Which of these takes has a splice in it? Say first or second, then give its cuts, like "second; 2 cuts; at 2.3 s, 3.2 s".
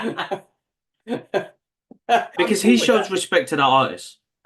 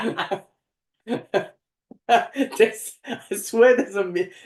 first; 1 cut; at 2.3 s